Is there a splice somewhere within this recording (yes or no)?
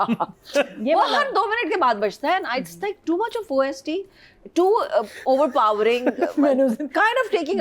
no